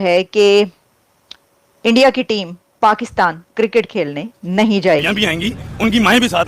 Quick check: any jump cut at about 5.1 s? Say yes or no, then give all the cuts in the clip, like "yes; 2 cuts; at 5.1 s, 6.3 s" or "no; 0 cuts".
yes; 1 cut; at 5.1 s